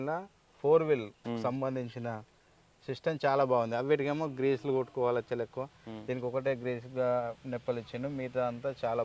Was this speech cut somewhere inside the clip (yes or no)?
no